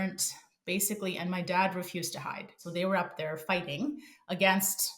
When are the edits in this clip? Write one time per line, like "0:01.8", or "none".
0:02.6